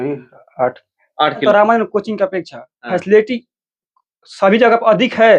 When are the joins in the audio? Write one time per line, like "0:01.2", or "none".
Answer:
0:01.4